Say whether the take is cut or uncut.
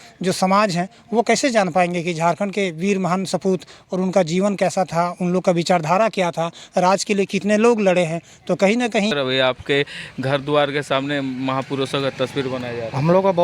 cut